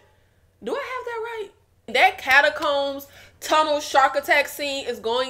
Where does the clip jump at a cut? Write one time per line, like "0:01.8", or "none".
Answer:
0:01.9